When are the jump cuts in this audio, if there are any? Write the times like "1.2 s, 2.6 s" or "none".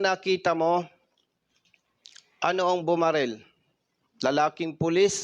none